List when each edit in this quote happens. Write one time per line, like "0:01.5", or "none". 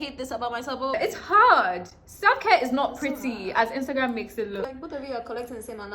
0:01.0
0:04.6